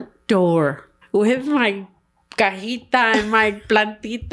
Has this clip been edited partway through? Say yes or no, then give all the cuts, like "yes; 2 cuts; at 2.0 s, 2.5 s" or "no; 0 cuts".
yes; 1 cut; at 0.9 s